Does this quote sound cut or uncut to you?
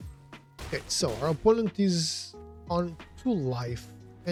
uncut